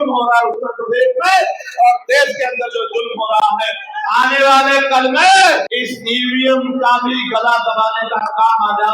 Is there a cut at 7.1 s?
no; 2 cuts; at 3.9 s, 5.7 s

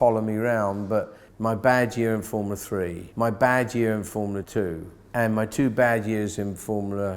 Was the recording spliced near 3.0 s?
yes; 3 cuts; at 1.2 s, 3.0 s, 4.6 s

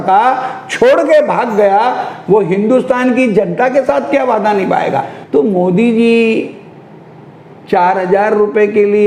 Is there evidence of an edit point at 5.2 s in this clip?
yes; 1 cut; at 5.2 s

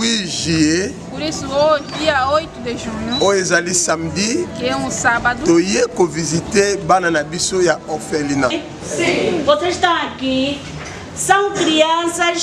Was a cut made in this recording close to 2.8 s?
no; 1 cut; at 8.6 s

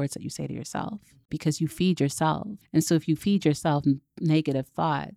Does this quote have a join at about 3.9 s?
no; 2 cuts; at 1.3 s, 2.5 s

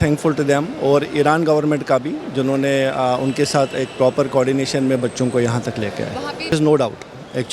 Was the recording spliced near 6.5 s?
yes; 1 cut; at 6.5 s

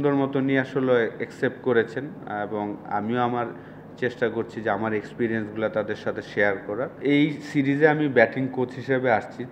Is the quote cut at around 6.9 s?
yes; 1 cut; at 6.9 s

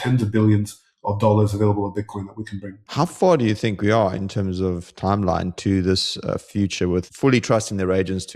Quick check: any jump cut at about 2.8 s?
yes; 2 cuts; at 2.8 s, 7.1 s

